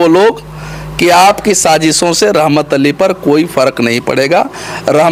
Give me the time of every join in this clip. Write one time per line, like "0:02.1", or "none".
none